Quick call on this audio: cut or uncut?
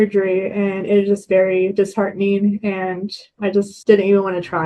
cut